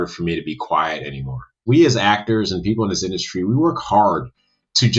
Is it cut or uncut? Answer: cut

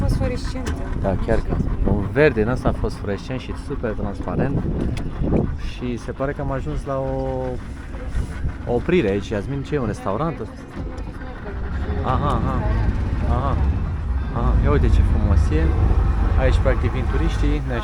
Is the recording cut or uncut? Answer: uncut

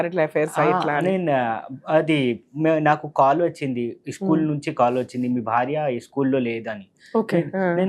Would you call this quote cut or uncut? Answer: uncut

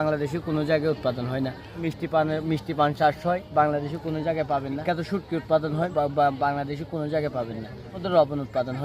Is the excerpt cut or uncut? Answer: cut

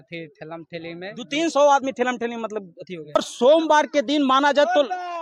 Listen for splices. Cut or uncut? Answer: cut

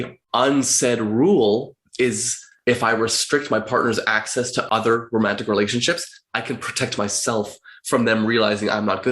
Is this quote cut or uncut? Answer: cut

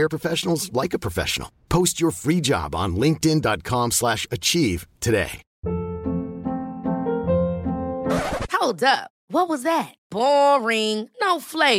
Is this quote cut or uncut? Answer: uncut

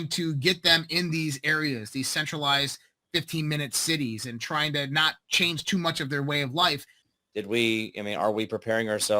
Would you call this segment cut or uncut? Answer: cut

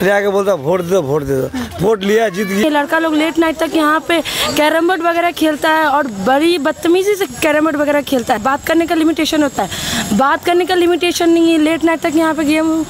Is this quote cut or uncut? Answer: cut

